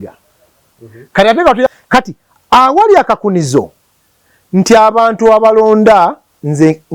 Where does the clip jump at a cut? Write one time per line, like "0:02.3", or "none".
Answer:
0:01.7